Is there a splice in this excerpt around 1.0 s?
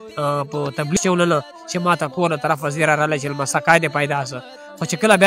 yes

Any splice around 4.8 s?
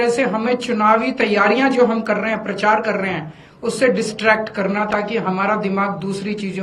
no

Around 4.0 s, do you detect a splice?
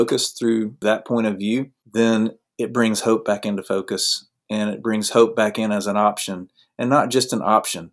no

